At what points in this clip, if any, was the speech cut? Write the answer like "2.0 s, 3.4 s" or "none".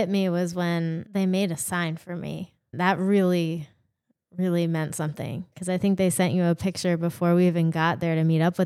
1.0 s, 2.7 s, 5.5 s

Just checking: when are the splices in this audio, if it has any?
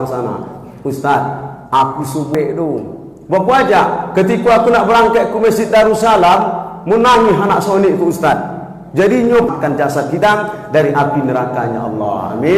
2.4 s, 9.5 s

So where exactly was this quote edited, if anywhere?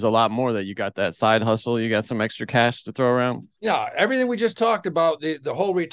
3.5 s

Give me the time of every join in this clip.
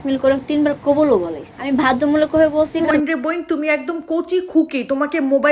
1.7 s, 2.9 s

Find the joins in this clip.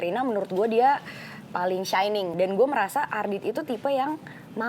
2.3 s

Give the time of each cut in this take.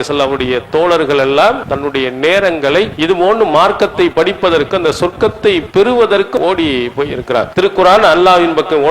1.7 s, 2.9 s, 6.4 s, 7.5 s

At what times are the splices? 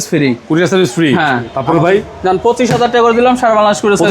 1.5 s

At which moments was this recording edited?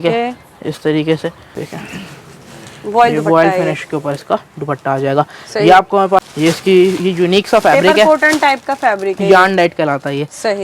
1.5 s, 6.3 s

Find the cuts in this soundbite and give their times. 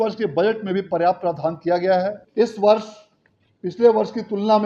2.2 s

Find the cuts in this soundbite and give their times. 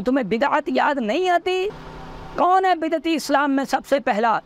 1.7 s

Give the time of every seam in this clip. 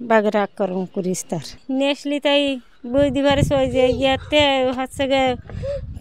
none

